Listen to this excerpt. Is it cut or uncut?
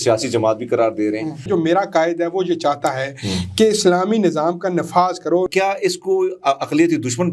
cut